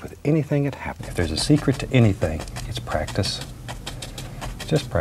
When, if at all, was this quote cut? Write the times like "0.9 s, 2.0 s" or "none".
1.0 s